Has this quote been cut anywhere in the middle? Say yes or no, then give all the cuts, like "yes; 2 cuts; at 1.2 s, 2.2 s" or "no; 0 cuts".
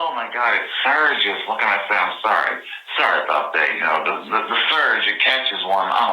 yes; 1 cut; at 1.2 s